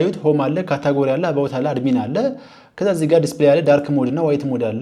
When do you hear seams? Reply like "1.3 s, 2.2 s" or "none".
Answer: none